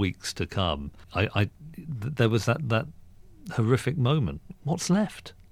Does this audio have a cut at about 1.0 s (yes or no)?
yes